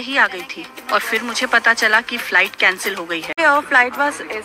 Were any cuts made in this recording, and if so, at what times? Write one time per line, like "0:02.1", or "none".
0:03.4